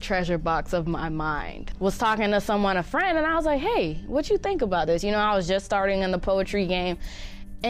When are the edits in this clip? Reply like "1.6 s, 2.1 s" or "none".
1.7 s